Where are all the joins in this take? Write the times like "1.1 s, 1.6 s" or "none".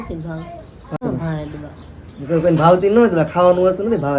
1.0 s